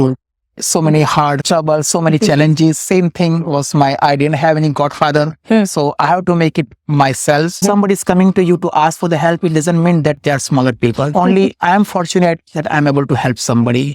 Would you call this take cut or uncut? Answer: cut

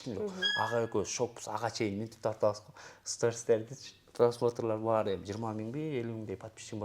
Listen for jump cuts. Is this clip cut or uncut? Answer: uncut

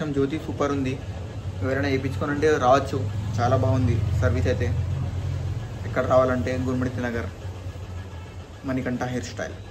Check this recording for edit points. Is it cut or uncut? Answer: uncut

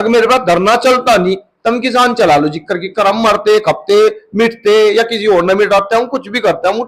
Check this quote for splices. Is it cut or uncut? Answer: uncut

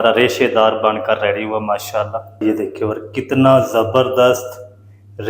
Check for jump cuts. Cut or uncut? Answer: cut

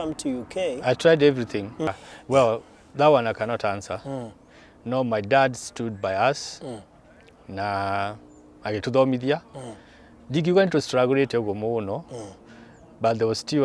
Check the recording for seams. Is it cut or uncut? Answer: cut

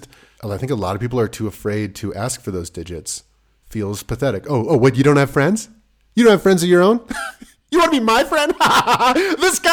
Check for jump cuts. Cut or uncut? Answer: uncut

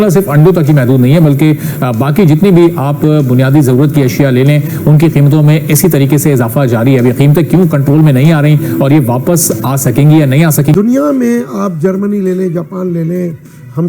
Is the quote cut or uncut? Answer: cut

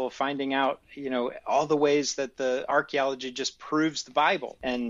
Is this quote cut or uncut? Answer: uncut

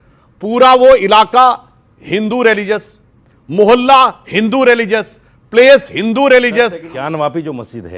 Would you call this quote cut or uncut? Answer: cut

